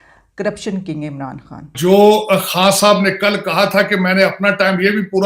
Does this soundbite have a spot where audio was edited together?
yes; 1 cut; at 1.7 s

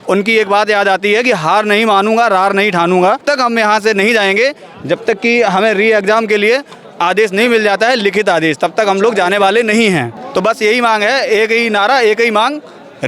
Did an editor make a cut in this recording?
yes; 2 cuts; at 3.2 s, 10.2 s

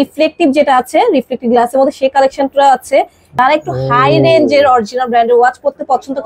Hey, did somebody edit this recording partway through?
yes; 1 cut; at 3.3 s

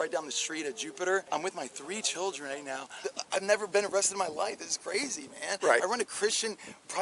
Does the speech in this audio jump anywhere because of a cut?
yes; 2 cuts; at 1.3 s, 2.9 s

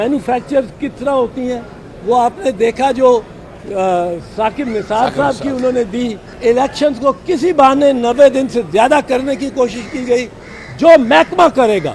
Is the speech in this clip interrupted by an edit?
yes; 1 cut; at 6.2 s

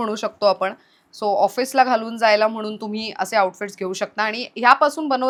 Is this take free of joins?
yes; 0 cuts

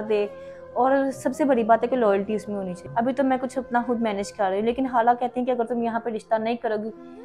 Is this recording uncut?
no; 1 cut; at 2.8 s

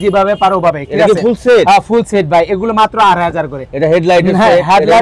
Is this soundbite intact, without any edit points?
yes; 0 cuts

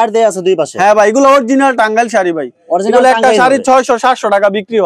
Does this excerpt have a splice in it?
no; 0 cuts

